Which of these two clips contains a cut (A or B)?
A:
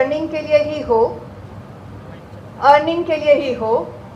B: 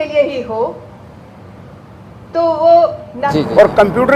B